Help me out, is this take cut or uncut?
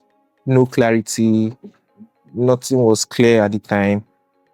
uncut